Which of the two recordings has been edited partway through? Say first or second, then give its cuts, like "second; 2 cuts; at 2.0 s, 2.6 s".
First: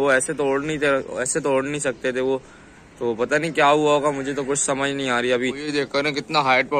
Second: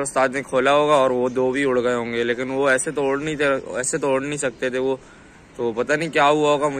first; 1 cut; at 5.6 s